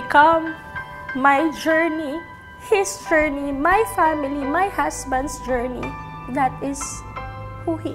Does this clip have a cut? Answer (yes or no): no